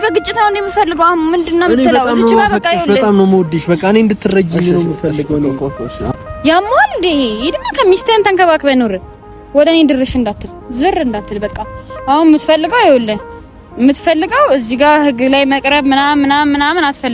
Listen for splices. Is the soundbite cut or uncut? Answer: cut